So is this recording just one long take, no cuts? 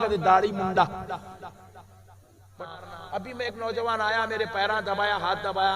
no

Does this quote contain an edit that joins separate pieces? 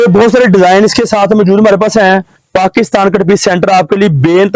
yes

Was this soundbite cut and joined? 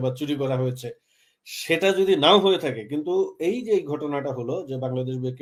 no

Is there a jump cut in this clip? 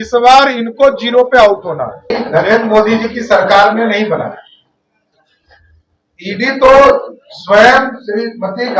yes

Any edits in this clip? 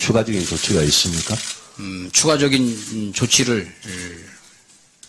no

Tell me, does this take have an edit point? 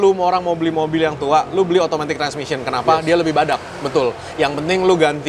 no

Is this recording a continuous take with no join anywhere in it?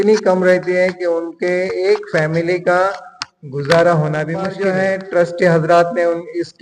no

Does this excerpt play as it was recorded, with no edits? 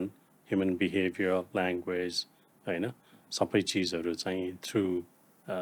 yes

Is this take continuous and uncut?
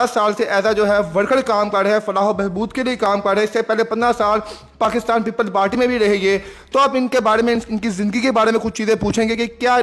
yes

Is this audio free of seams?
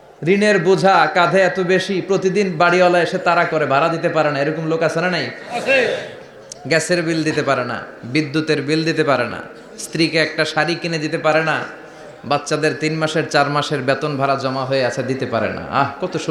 yes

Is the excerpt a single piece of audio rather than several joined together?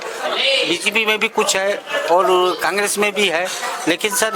yes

